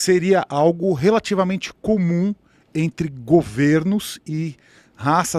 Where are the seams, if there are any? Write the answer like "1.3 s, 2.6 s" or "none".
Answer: none